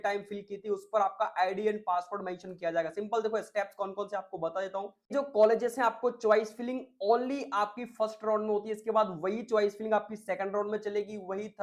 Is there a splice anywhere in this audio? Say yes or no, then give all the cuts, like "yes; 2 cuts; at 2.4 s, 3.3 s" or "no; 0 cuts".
yes; 1 cut; at 5.1 s